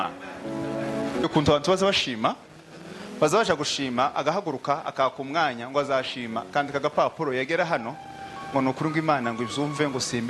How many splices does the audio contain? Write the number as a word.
one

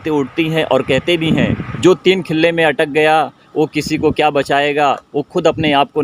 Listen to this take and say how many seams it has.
zero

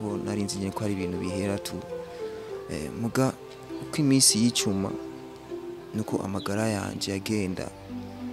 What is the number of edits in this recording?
zero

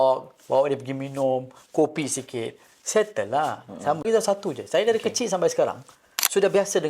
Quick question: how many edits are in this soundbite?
one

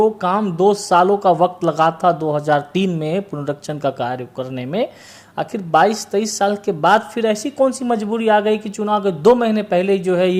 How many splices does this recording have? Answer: zero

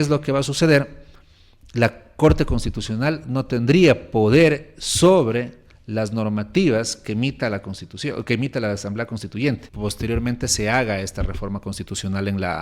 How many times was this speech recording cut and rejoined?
one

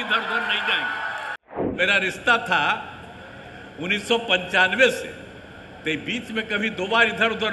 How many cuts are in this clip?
one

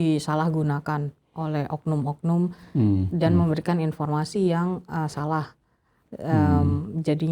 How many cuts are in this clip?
zero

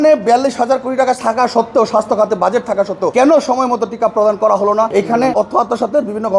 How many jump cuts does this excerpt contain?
two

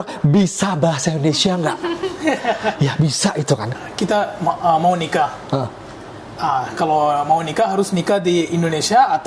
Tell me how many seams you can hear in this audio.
one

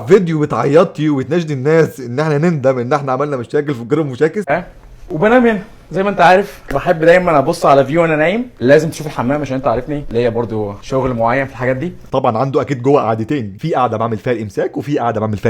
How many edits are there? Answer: one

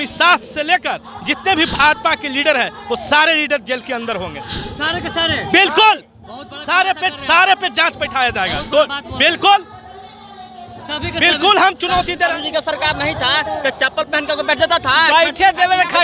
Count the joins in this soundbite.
one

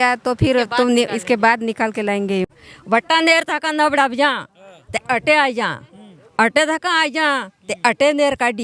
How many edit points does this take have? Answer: one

